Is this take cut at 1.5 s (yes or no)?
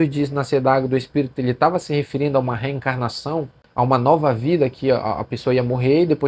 no